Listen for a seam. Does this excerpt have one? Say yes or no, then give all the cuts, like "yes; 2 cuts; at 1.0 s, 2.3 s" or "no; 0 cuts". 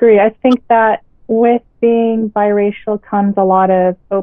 no; 0 cuts